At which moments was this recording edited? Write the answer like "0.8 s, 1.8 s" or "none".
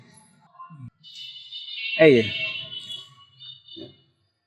1.0 s

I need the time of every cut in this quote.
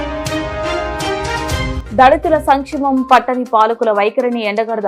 1.8 s

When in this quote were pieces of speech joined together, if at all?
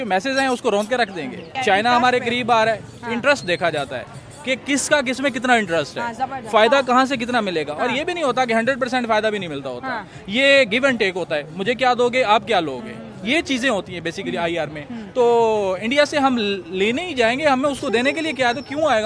1.4 s

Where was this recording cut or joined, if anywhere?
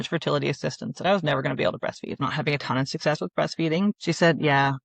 2.2 s, 3.9 s

